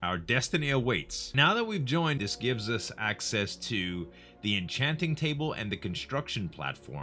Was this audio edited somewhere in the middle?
yes; 2 cuts; at 1.3 s, 2.2 s

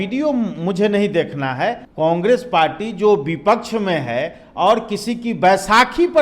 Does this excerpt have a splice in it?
yes; 1 cut; at 1.8 s

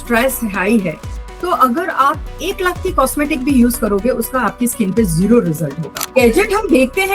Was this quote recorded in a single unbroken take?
no; 1 cut; at 6.0 s

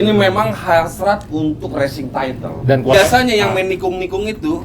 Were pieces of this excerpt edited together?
yes; 1 cut; at 2.9 s

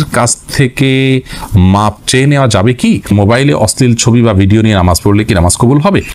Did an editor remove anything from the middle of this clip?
yes; 1 cut; at 3.1 s

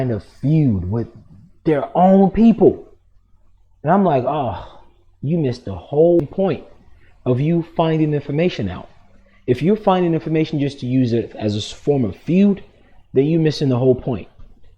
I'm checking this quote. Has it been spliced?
yes; 1 cut; at 6.2 s

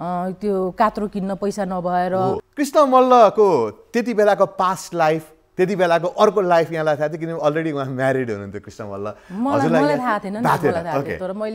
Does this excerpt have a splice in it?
yes; 1 cut; at 2.4 s

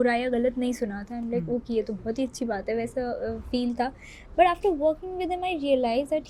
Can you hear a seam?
no; 0 cuts

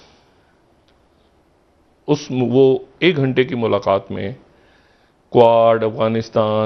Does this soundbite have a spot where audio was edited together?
no; 0 cuts

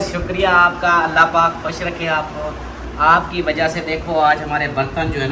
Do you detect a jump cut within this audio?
no; 0 cuts

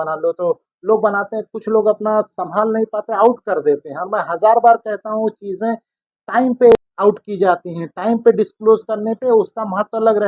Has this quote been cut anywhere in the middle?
no; 0 cuts

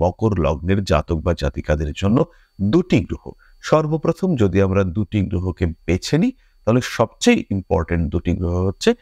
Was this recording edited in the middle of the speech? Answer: no; 0 cuts

